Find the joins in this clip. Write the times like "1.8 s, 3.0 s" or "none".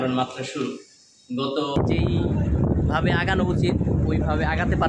1.8 s